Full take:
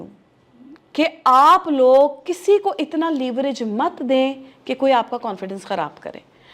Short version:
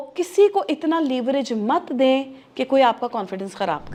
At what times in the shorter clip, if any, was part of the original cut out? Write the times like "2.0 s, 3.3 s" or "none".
none

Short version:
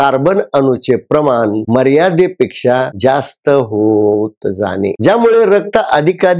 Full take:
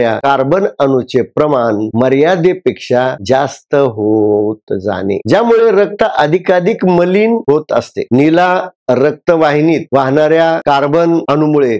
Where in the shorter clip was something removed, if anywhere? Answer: none

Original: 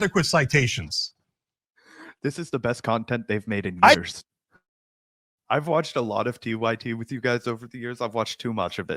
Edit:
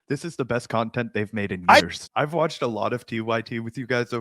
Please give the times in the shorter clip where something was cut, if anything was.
2.0 s

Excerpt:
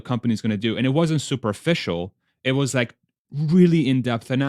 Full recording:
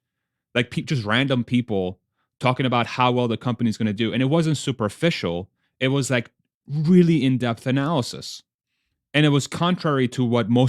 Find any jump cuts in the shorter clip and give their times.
none

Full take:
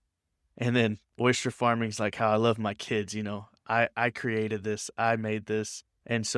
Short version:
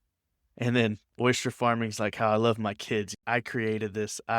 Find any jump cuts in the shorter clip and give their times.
3.2 s

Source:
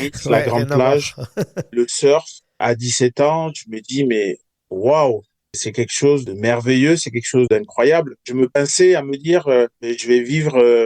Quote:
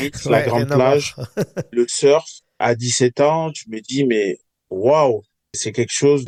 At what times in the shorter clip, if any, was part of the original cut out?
none

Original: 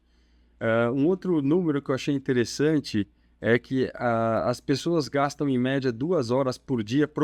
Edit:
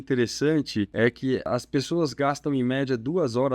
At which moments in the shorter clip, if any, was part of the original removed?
1.3 s

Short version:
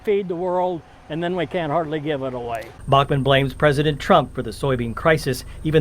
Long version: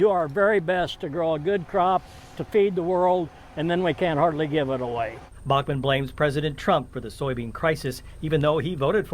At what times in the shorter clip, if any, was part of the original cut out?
2.7 s

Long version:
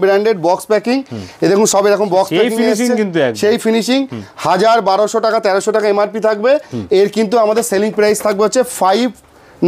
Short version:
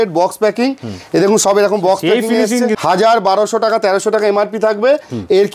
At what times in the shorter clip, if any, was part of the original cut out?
2.8 s

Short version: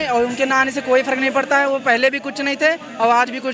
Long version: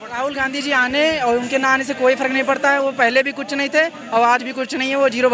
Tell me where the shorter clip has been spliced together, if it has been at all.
none

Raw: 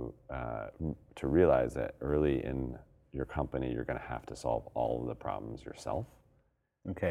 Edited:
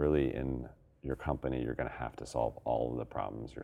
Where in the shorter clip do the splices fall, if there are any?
none

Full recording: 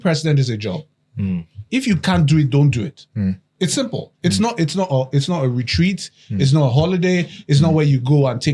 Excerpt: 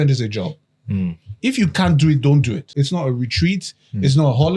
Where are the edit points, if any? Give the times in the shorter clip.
2.7 s

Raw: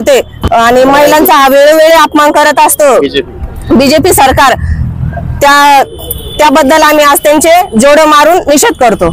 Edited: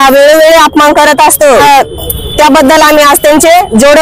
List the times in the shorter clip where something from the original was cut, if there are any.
1.6 s

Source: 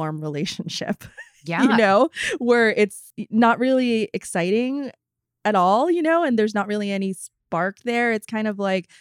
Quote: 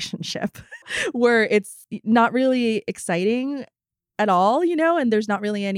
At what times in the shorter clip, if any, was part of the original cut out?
0.9 s

